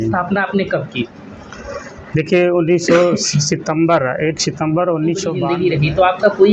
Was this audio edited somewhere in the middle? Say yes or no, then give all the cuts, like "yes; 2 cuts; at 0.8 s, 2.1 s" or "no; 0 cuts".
yes; 1 cut; at 5.5 s